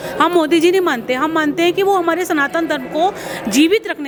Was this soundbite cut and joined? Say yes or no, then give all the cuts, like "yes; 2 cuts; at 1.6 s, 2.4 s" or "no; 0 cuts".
no; 0 cuts